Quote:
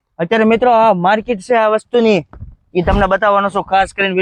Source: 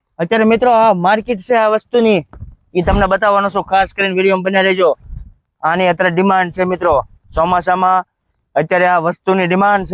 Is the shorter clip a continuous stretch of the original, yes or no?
yes